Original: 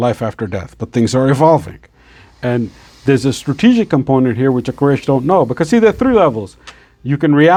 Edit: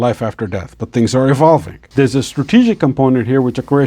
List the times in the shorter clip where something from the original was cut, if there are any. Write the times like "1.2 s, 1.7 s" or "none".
1.8 s